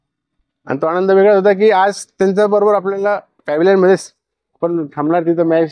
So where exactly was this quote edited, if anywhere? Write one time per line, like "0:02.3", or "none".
0:03.3